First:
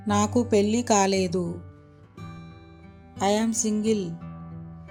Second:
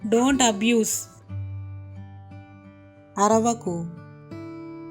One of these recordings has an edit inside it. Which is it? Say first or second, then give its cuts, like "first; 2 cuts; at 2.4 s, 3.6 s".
second; 3 cuts; at 0.9 s, 2.8 s, 4.0 s